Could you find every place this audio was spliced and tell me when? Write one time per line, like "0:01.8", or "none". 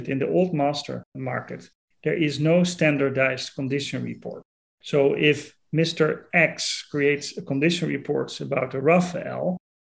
0:01.1